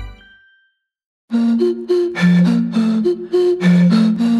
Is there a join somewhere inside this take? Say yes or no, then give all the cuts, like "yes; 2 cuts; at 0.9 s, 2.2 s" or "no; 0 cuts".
yes; 2 cuts; at 1.3 s, 3.1 s